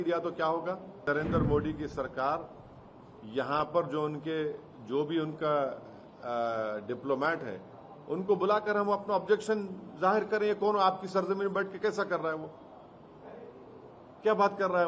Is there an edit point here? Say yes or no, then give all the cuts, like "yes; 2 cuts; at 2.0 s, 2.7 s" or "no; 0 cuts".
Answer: yes; 1 cut; at 1.0 s